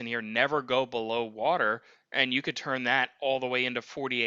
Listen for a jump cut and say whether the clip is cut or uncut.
uncut